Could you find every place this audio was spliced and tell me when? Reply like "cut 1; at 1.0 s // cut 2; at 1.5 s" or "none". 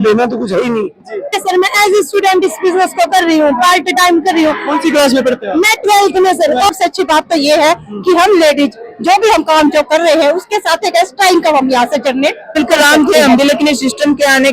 cut 1; at 1.4 s // cut 2; at 6.7 s // cut 3; at 12.6 s

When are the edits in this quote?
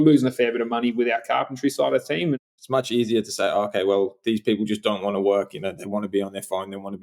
cut 1; at 2.4 s

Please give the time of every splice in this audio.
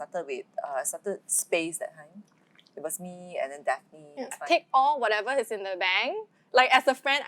cut 1; at 4.4 s // cut 2; at 6.3 s

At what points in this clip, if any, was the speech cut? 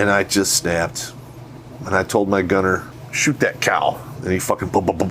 cut 1; at 2.9 s

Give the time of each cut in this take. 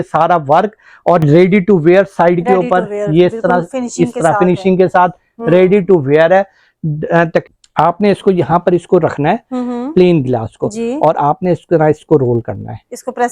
cut 1; at 7.4 s

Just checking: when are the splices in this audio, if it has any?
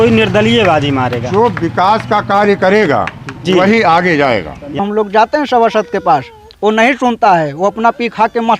cut 1; at 4.8 s

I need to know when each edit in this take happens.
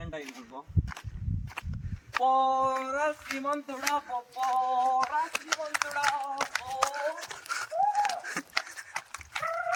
none

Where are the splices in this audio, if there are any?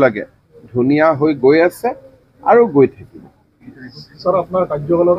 none

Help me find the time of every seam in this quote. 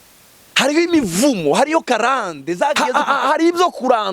cut 1; at 2.8 s

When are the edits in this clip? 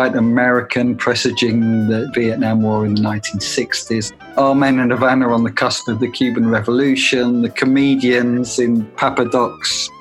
cut 1; at 2.1 s // cut 2; at 4.4 s

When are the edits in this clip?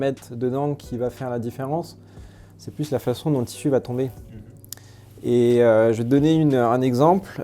none

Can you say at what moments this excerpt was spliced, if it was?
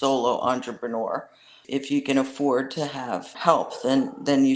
cut 1; at 1.6 s // cut 2; at 3.3 s

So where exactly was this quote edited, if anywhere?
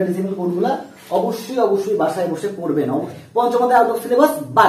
cut 1; at 3.1 s

